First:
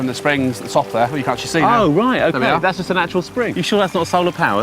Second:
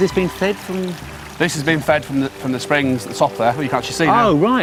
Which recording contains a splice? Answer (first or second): first